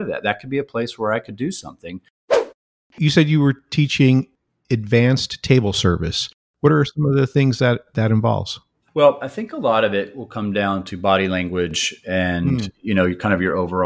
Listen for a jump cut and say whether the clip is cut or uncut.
cut